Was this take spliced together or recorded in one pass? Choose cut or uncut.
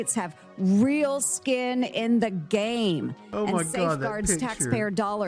uncut